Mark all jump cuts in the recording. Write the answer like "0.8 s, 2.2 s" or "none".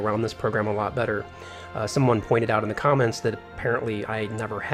none